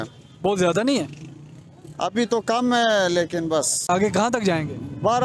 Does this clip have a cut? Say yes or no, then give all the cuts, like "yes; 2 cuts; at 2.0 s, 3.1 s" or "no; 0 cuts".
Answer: yes; 1 cut; at 3.8 s